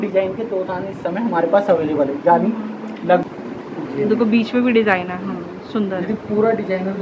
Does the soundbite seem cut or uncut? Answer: cut